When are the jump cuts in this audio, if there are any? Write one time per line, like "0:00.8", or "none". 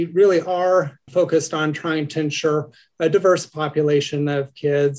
0:01.0